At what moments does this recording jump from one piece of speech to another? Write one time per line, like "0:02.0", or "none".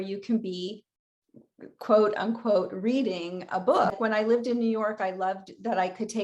0:03.9